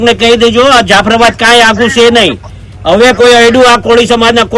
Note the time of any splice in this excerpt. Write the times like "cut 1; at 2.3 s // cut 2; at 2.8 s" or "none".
none